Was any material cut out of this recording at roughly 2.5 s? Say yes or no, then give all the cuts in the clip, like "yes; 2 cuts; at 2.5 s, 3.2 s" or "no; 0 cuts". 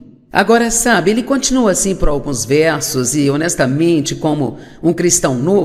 yes; 1 cut; at 2.5 s